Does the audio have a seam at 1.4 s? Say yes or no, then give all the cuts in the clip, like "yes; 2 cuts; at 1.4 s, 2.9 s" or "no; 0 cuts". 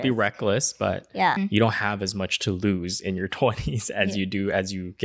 yes; 1 cut; at 1.4 s